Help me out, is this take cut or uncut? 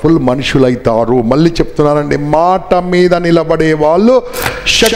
uncut